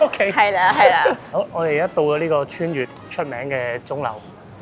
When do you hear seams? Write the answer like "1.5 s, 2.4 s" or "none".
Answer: none